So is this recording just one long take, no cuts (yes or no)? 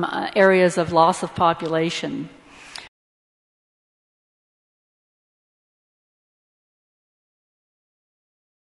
yes